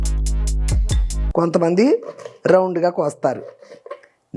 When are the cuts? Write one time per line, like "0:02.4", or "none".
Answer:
0:01.3